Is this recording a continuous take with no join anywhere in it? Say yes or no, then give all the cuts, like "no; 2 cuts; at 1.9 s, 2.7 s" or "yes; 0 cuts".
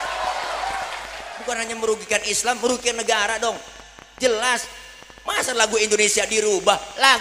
no; 1 cut; at 1.3 s